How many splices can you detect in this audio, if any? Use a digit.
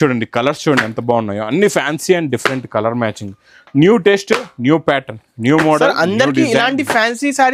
0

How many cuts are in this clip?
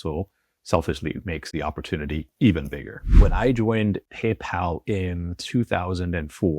2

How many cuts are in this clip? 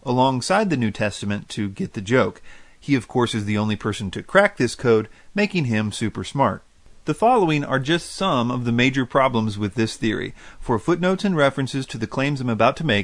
1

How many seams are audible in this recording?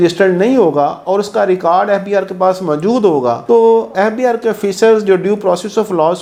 0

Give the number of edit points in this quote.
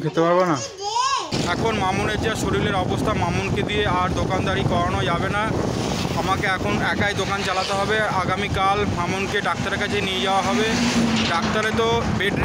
1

